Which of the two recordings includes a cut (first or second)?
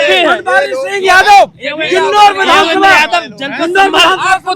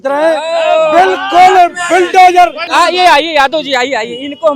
second